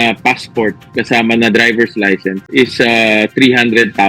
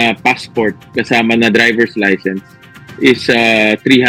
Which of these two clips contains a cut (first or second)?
first